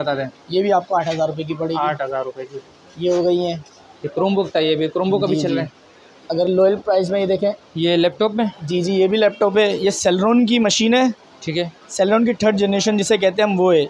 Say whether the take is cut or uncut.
uncut